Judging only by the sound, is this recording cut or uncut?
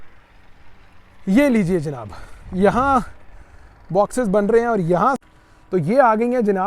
cut